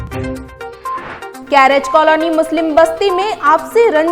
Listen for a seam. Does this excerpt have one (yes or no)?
yes